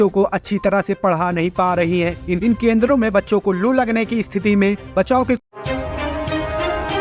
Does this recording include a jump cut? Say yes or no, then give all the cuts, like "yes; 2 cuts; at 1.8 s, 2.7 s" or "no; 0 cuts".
yes; 1 cut; at 5.4 s